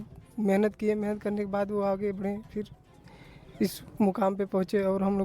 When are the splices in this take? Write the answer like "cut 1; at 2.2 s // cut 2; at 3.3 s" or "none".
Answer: none